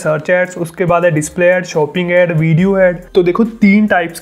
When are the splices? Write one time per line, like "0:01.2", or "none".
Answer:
0:03.0